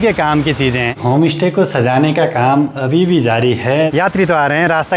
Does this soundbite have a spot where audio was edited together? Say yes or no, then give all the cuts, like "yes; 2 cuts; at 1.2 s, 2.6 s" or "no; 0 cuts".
yes; 2 cuts; at 0.9 s, 3.9 s